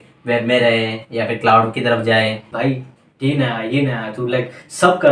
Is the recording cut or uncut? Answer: cut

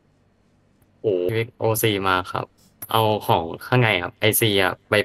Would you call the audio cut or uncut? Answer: cut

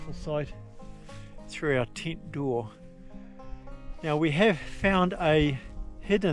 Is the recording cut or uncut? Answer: uncut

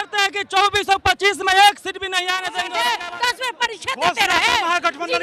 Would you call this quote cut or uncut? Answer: cut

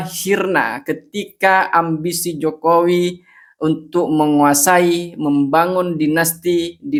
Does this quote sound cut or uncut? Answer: uncut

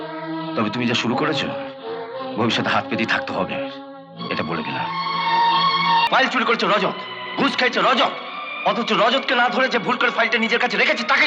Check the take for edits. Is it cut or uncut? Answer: cut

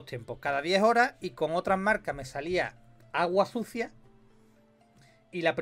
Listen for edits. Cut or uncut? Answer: uncut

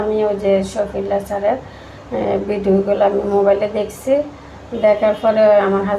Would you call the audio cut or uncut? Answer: uncut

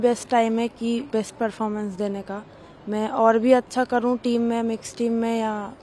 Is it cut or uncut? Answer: uncut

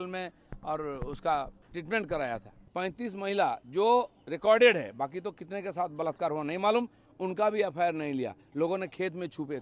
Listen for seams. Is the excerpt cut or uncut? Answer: cut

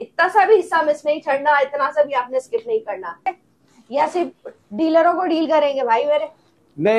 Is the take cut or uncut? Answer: cut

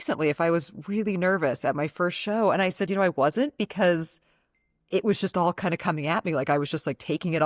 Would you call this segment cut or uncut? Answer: uncut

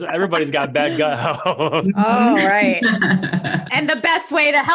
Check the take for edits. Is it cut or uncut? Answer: uncut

